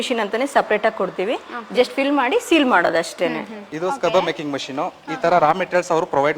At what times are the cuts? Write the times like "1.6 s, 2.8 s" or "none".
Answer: 3.6 s